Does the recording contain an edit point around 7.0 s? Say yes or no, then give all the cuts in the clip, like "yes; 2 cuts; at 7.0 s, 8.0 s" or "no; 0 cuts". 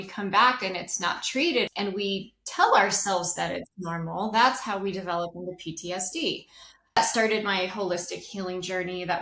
yes; 2 cuts; at 1.7 s, 7.0 s